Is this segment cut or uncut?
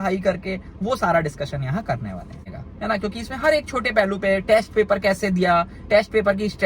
cut